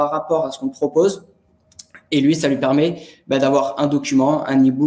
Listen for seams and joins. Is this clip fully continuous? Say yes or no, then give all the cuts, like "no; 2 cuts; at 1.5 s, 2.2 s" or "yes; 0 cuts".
yes; 0 cuts